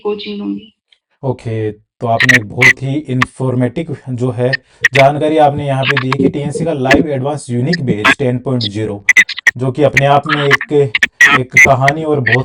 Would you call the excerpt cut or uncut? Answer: uncut